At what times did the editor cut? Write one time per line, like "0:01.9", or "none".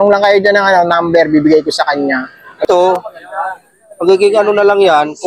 0:02.6